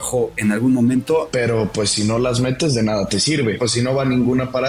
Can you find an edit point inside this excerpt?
yes; 2 cuts; at 1.3 s, 3.6 s

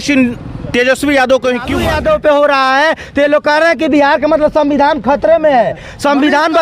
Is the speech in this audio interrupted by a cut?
yes; 1 cut; at 1.8 s

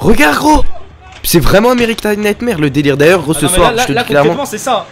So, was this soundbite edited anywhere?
no; 0 cuts

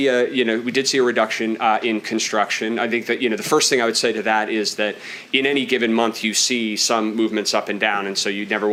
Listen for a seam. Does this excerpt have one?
no; 0 cuts

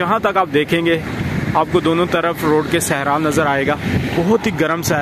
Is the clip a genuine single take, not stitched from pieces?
no; 1 cut; at 4.1 s

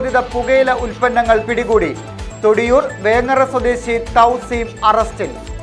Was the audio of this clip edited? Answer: no; 0 cuts

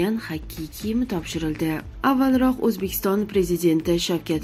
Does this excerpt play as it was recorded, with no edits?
yes; 0 cuts

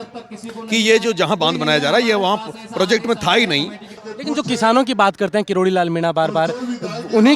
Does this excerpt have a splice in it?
yes; 1 cut; at 3.8 s

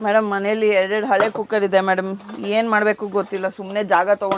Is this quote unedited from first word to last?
yes; 0 cuts

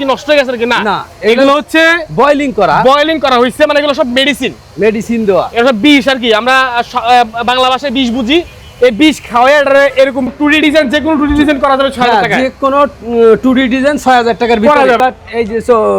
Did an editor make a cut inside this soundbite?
yes; 2 cuts; at 10.3 s, 15.0 s

